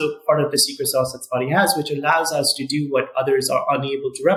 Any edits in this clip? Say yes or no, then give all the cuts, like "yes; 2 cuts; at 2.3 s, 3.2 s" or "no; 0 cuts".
no; 0 cuts